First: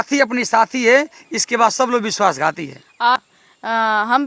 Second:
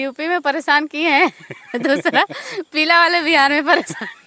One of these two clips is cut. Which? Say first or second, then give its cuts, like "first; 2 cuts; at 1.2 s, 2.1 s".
first; 1 cut; at 3.2 s